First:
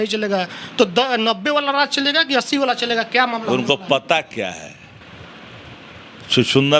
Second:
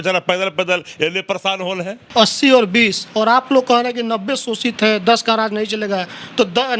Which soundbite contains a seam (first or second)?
second